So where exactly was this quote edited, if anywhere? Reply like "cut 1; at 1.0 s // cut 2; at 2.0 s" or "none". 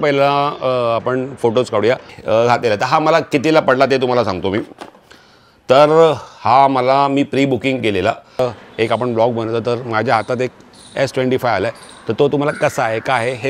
cut 1; at 2.2 s // cut 2; at 8.4 s